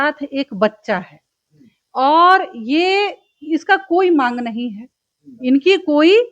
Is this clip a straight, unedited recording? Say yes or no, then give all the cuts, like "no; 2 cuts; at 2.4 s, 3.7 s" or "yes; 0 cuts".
yes; 0 cuts